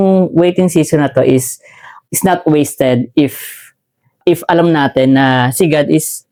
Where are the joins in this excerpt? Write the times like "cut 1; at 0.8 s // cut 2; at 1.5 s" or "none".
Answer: none

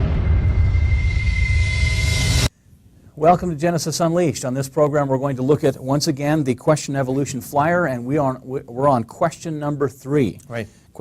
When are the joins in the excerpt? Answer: cut 1; at 6.0 s

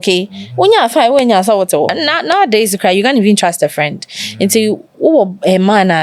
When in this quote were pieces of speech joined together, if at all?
cut 1; at 2.0 s

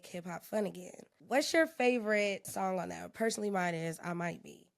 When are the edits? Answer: cut 1; at 1.1 s // cut 2; at 2.5 s

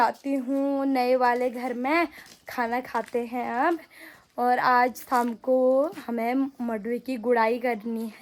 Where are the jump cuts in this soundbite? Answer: none

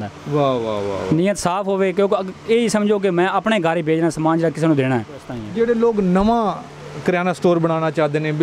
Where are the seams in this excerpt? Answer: cut 1; at 5.3 s

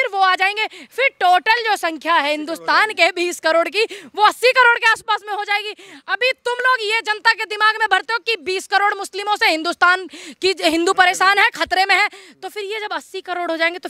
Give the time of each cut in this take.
none

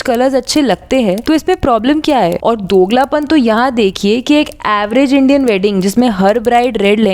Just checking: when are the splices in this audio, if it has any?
cut 1; at 2.4 s

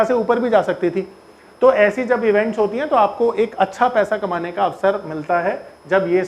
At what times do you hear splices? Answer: cut 1; at 4.8 s

